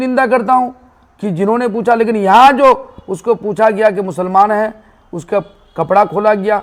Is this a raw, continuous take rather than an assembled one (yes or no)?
yes